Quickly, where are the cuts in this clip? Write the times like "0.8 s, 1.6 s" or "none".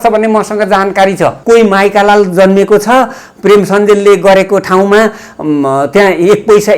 1.4 s